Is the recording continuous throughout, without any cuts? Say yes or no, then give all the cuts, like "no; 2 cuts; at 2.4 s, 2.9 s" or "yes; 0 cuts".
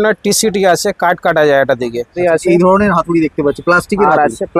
no; 1 cut; at 2.1 s